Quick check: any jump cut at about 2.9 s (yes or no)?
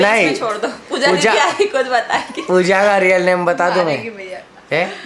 no